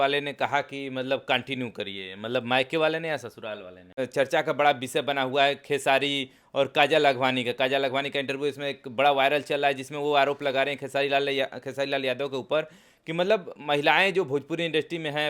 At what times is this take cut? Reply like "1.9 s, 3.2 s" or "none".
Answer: 3.9 s